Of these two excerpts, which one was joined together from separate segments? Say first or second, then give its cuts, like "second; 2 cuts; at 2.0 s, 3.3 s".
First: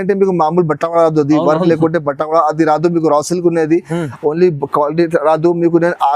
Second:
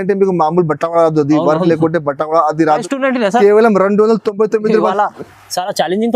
second; 1 cut; at 2.8 s